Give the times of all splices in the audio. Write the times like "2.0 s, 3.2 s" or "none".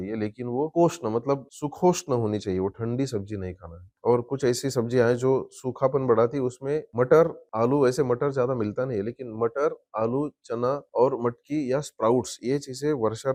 none